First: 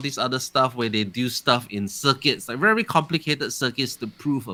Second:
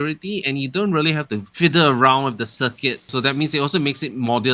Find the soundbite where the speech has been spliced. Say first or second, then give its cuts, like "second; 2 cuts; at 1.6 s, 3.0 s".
second; 2 cuts; at 1.5 s, 3.1 s